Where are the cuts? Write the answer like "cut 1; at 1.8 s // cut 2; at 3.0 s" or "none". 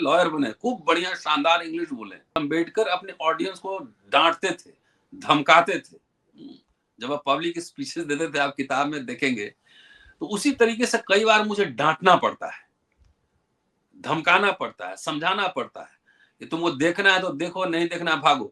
cut 1; at 2.4 s